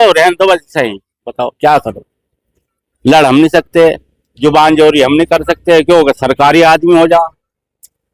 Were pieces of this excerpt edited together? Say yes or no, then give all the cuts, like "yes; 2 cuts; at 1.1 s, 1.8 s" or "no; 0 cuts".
no; 0 cuts